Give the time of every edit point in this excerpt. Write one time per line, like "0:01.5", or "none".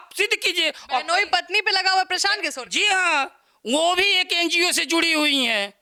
none